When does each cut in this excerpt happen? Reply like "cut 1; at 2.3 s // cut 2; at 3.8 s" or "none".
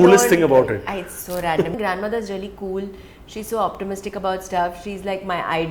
cut 1; at 1.7 s